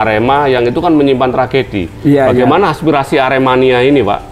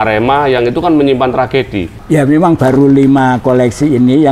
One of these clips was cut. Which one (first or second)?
second